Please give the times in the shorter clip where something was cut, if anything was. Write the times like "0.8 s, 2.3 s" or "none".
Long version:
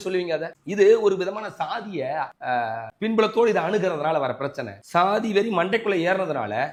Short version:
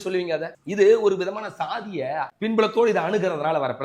2.3 s